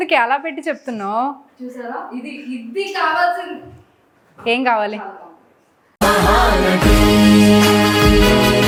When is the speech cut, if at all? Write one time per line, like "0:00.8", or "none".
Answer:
none